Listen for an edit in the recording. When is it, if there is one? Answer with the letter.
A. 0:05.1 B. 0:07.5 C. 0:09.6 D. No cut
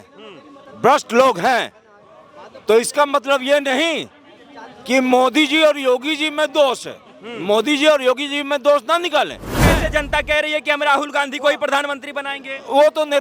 C